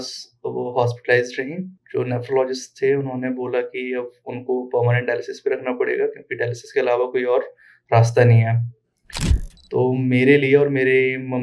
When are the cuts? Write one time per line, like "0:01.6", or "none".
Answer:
0:01.8